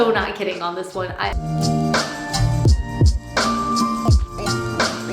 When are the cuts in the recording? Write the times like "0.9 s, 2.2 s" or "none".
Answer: 1.4 s